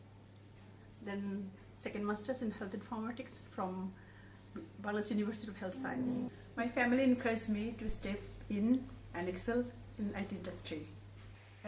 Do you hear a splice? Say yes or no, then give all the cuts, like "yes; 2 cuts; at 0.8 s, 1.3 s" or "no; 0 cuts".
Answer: yes; 1 cut; at 6.4 s